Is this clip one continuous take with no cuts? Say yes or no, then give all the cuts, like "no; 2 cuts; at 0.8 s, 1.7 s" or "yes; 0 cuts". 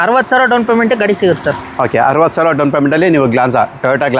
yes; 0 cuts